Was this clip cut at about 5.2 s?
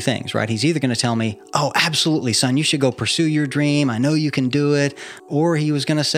yes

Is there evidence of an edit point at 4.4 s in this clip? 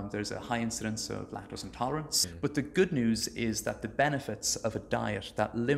no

